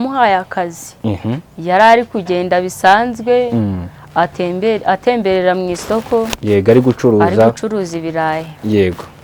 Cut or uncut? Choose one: uncut